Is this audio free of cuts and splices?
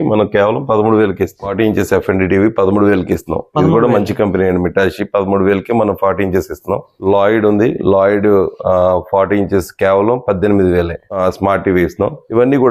yes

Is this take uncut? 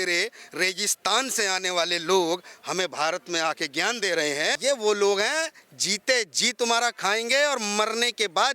no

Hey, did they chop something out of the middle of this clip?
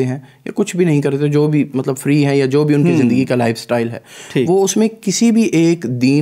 no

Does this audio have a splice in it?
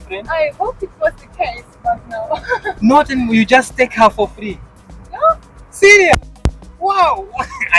no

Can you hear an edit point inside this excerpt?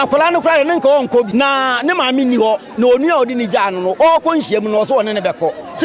yes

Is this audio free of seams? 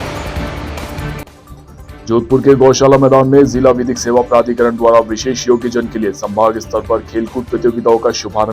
no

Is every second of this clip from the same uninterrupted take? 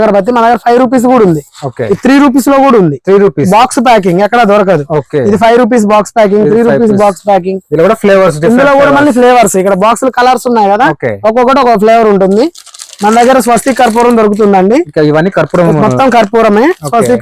yes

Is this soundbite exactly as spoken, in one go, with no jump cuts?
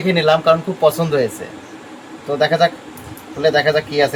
yes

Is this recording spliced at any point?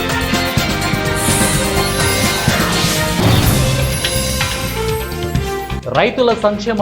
yes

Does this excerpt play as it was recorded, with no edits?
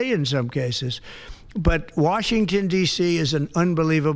yes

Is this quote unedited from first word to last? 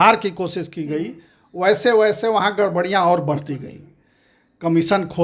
yes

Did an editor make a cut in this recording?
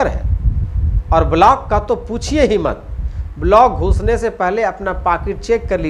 no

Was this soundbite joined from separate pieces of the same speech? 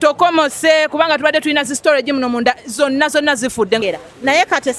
yes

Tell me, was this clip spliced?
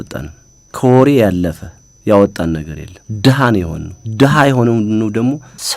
no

